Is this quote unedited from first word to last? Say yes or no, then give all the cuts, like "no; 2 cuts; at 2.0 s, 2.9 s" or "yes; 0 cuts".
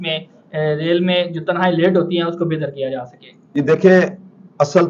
yes; 0 cuts